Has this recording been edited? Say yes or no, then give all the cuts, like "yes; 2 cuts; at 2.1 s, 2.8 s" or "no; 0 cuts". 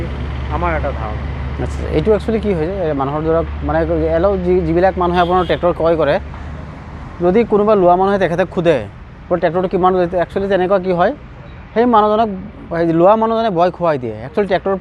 no; 0 cuts